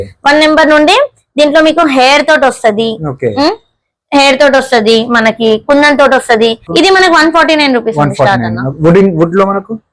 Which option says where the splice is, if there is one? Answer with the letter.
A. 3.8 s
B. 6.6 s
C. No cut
B